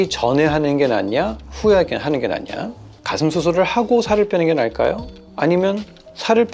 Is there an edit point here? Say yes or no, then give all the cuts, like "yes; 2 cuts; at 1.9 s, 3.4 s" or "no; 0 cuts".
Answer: yes; 1 cut; at 2.9 s